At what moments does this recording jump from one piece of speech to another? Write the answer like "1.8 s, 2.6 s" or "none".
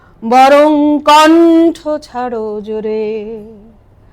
none